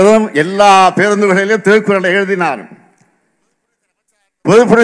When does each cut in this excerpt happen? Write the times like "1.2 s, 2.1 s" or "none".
none